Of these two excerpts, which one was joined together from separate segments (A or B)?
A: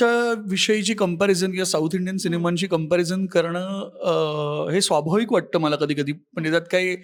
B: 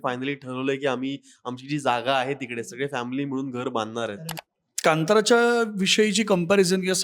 B